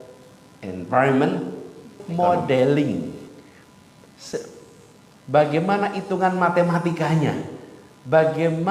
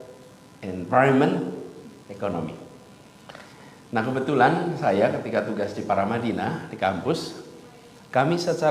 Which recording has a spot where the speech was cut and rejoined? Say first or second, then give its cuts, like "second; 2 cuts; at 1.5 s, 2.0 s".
first; 1 cut; at 2.0 s